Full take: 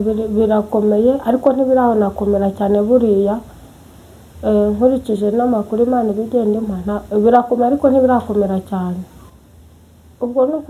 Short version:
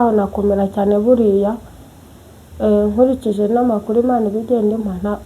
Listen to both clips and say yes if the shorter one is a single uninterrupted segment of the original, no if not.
yes